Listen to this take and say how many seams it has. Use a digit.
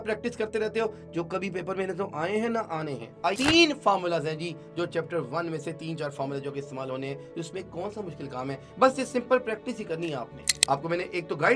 2